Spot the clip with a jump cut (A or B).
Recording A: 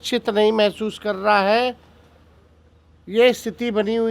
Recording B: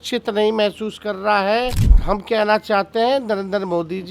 B